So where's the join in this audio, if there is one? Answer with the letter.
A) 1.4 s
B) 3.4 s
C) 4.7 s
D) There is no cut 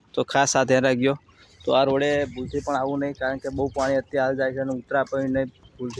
D